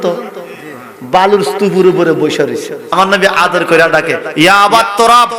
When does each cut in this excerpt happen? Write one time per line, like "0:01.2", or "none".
0:02.9